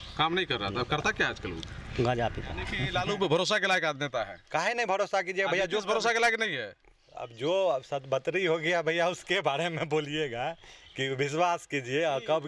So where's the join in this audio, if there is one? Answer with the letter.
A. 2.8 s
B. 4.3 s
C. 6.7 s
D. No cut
A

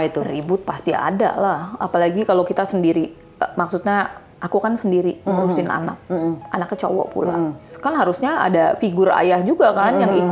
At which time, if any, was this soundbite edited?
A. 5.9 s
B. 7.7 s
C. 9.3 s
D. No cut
B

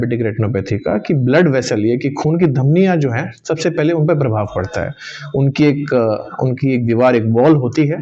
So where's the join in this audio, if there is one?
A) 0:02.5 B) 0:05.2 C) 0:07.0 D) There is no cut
D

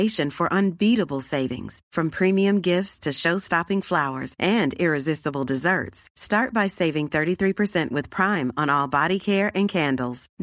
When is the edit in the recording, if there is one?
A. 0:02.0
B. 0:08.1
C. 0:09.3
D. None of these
D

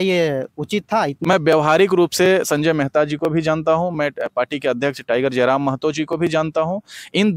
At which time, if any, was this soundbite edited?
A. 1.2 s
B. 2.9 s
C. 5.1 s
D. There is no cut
A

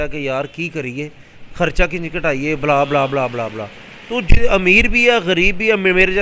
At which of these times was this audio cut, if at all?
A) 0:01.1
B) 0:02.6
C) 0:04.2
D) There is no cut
D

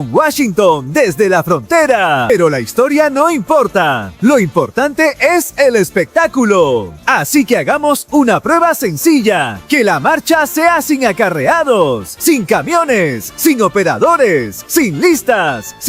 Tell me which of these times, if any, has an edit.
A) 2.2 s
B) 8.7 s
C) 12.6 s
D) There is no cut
A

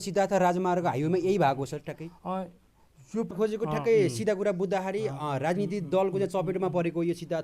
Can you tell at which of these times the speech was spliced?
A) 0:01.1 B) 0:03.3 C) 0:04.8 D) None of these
B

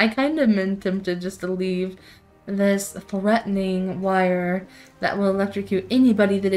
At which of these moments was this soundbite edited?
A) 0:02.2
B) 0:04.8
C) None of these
C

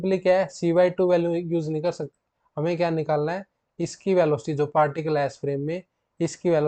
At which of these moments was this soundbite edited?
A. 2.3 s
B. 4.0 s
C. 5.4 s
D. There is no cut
D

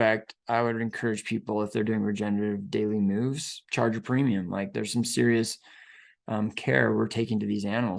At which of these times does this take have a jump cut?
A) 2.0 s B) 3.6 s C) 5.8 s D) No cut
B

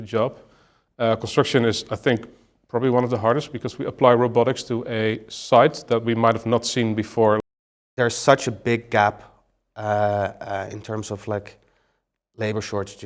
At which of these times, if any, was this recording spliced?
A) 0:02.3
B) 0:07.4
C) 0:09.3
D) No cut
B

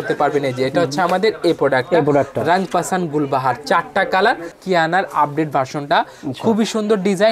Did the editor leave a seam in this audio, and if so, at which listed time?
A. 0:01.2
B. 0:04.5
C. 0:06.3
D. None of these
B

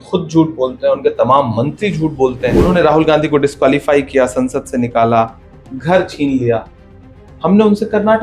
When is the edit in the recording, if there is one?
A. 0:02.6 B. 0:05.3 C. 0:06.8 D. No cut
A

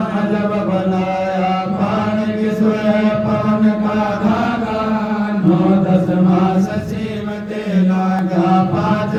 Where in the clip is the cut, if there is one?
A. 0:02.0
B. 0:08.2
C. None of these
C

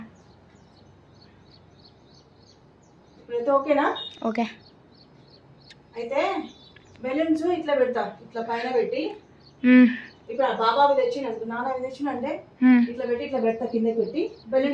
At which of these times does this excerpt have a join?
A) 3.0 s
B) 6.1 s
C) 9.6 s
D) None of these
A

